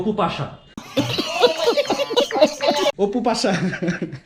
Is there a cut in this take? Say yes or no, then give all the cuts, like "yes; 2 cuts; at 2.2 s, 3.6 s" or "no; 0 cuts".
yes; 1 cut; at 2.9 s